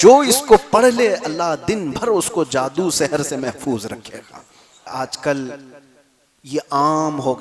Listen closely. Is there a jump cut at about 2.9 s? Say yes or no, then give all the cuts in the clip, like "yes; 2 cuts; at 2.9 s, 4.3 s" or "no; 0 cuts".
no; 1 cut; at 4.9 s